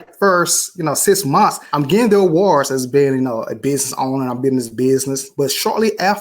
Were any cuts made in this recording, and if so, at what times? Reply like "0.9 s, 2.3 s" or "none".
1.6 s, 5.3 s